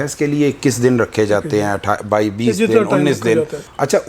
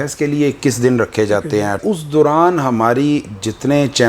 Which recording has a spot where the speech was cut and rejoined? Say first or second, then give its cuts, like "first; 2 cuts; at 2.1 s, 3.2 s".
second; 1 cut; at 1.8 s